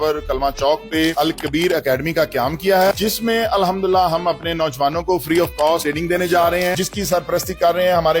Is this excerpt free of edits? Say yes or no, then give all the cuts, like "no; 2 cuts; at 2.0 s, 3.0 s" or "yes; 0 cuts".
no; 2 cuts; at 3.0 s, 6.8 s